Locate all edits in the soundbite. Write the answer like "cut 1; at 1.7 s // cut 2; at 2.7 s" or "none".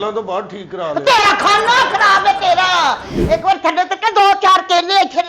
cut 1; at 3.1 s